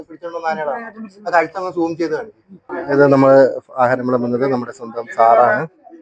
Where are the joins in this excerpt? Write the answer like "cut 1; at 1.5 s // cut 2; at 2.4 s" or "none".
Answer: cut 1; at 2.6 s